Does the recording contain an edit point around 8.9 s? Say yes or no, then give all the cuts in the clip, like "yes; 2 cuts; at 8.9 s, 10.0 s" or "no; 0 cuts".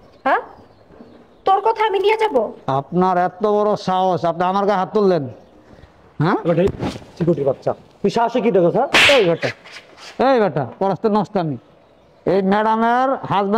yes; 1 cut; at 8.9 s